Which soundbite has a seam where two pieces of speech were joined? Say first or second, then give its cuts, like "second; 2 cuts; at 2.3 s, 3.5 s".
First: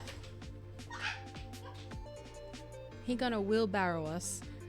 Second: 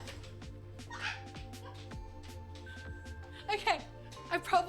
first; 1 cut; at 2.1 s